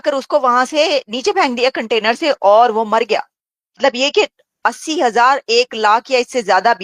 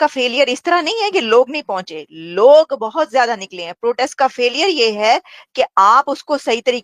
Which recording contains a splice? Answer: first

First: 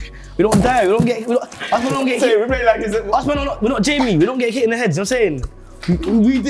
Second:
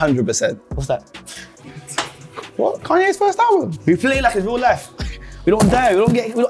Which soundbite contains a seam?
second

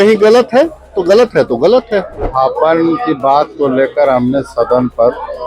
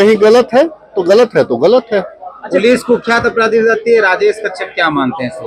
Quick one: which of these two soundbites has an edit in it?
first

